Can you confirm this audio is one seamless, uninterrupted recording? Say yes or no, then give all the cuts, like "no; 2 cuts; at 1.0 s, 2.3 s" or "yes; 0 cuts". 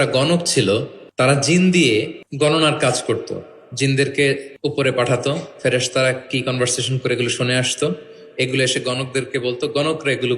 no; 3 cuts; at 1.0 s, 2.2 s, 4.5 s